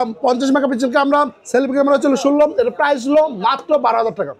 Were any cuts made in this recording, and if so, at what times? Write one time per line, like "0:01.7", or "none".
none